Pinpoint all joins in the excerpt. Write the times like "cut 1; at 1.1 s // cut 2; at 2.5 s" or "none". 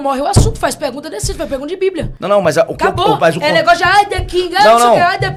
none